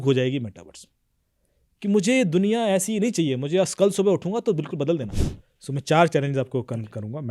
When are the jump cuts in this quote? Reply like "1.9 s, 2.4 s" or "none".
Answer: 5.2 s

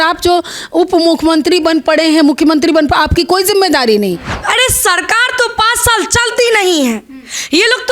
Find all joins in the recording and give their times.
4.3 s

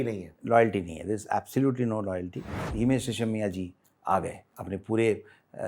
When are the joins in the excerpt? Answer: 2.6 s

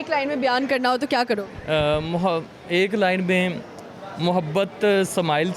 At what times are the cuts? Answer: none

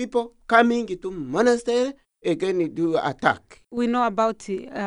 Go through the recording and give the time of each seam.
2.1 s, 3.6 s

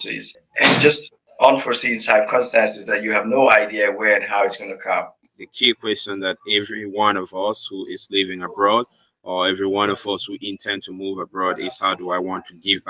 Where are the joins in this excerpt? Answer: 5.3 s

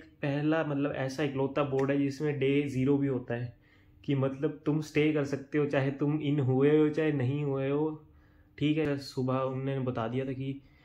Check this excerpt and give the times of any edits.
8.8 s

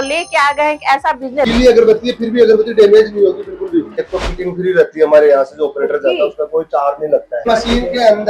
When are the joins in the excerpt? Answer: 1.5 s, 4.0 s, 7.5 s

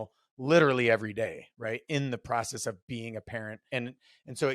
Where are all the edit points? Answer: 3.6 s

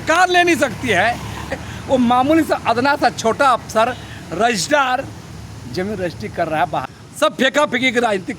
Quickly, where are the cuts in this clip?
1.5 s, 6.9 s

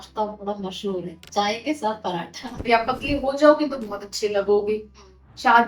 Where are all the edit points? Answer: 2.6 s

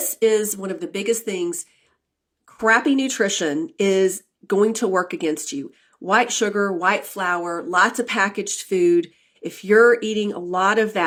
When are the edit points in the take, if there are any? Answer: none

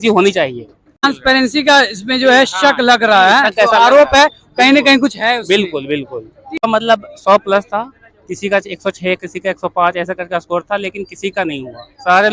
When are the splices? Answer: 1.1 s, 6.6 s

